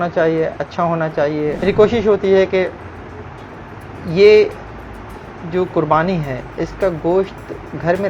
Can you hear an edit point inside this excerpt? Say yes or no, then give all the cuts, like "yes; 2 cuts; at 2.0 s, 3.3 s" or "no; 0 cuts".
yes; 1 cut; at 1.6 s